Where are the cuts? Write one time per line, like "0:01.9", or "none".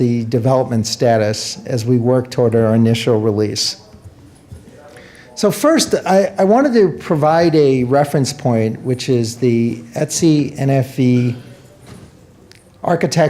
0:04.3